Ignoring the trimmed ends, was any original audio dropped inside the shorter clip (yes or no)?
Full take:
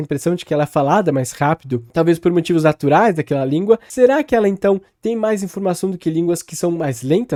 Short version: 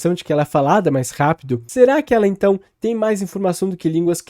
yes